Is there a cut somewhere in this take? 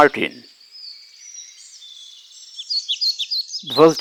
no; 0 cuts

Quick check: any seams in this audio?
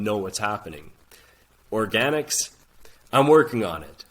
no; 0 cuts

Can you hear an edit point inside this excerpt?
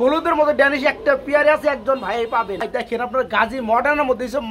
yes; 1 cut; at 2.7 s

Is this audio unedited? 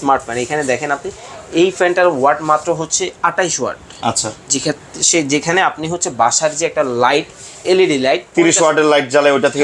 yes; 0 cuts

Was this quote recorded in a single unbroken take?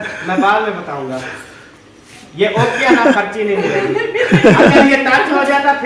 yes; 0 cuts

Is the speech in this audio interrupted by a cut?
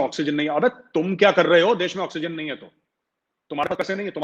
no; 0 cuts

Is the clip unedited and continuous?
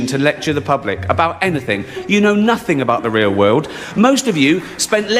yes; 0 cuts

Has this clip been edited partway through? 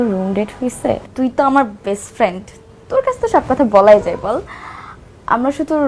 yes; 1 cut; at 1.1 s

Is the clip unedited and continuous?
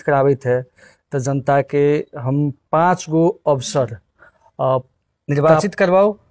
no; 1 cut; at 5.2 s

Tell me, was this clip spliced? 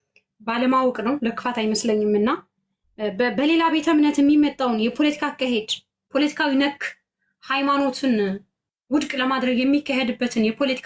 no; 0 cuts

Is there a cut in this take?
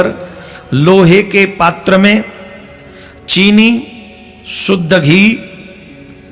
no; 0 cuts

